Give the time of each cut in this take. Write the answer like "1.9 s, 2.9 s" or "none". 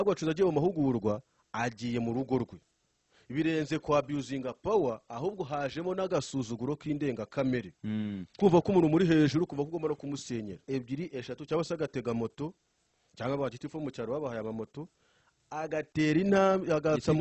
10.6 s